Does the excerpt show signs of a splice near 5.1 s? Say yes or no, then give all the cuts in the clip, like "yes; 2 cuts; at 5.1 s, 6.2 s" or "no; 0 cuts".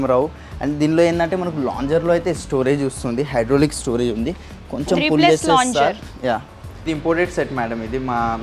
no; 1 cut; at 6.7 s